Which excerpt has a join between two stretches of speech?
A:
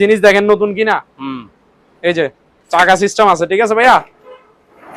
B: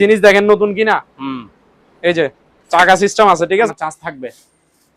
B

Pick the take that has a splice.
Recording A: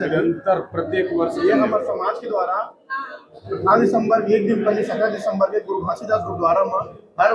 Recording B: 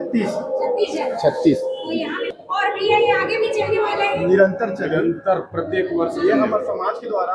B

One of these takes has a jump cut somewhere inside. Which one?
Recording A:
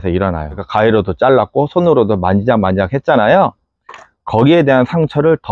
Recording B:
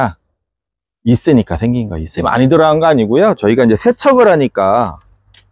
B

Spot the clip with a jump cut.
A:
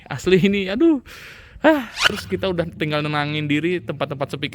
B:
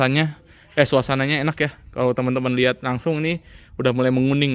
A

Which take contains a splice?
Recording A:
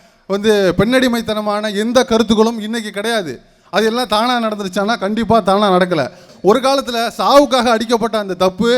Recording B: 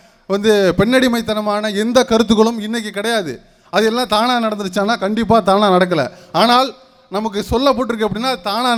A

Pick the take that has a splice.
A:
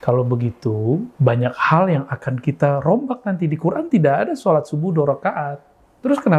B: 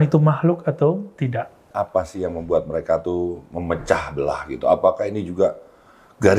B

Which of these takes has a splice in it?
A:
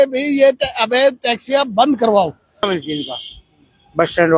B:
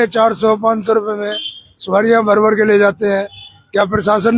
A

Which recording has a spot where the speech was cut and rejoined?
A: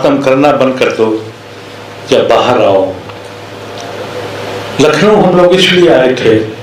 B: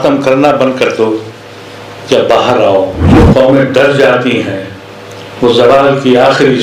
B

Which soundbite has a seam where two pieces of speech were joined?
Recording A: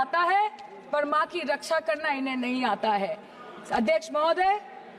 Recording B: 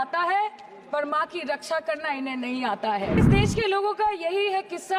B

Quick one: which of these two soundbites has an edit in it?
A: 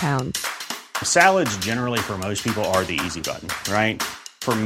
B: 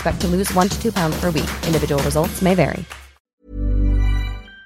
B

